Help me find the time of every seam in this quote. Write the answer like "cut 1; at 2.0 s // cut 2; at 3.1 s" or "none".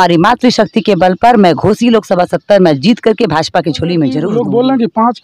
cut 1; at 4.2 s